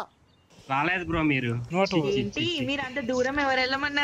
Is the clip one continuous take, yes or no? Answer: yes